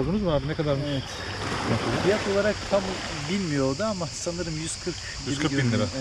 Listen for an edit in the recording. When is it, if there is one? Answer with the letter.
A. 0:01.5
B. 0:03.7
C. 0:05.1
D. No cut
D